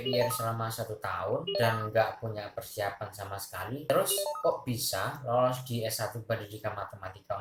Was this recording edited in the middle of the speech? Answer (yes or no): no